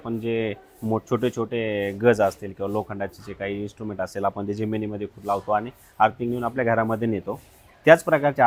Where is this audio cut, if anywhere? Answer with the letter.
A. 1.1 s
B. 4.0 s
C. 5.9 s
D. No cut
D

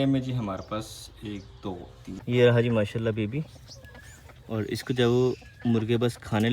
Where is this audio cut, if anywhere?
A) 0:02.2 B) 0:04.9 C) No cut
A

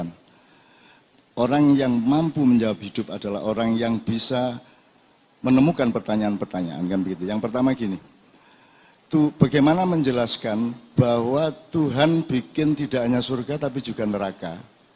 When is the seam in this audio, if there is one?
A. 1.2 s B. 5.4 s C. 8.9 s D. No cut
D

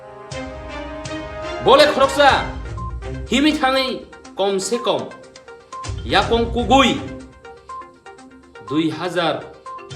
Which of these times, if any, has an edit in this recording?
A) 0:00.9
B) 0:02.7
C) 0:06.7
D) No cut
A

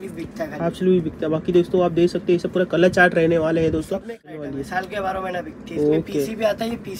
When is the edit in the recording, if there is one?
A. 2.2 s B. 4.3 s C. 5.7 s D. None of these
B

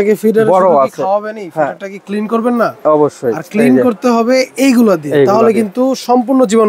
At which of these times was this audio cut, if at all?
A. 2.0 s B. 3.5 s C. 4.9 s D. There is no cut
D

